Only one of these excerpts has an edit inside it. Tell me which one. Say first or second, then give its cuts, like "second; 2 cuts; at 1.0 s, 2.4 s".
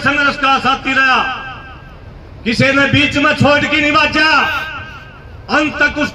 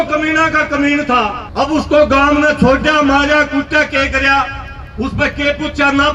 second; 1 cut; at 1.4 s